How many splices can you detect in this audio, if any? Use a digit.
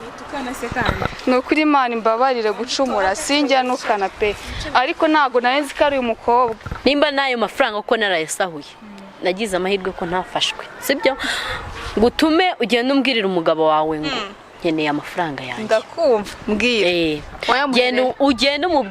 1